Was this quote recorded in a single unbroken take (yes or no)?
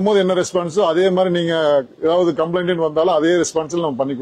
yes